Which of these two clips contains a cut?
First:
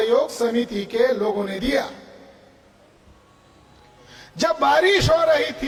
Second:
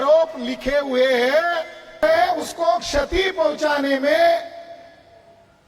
second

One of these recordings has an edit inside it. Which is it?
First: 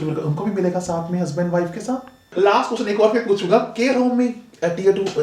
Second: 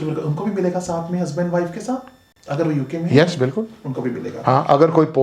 first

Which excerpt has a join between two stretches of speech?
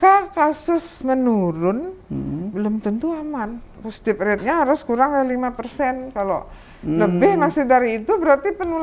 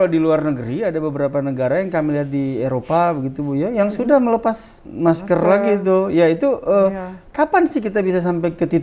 second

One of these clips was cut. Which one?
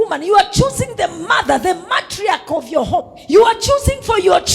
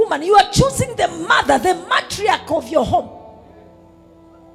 first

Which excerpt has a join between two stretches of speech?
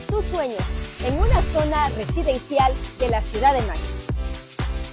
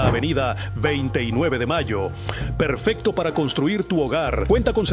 first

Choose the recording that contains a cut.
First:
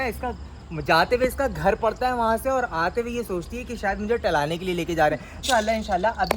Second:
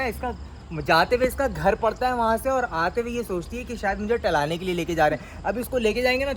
first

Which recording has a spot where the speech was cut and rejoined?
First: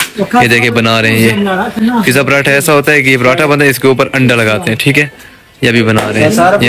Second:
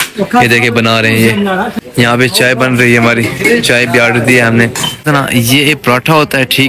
second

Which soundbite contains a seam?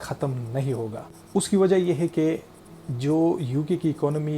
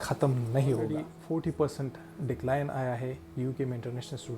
second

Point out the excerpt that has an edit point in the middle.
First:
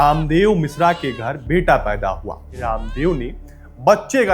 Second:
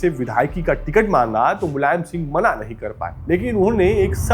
first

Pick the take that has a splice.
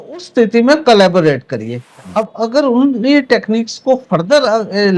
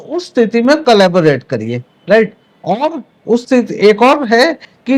first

